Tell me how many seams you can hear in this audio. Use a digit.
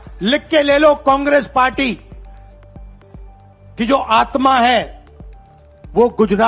0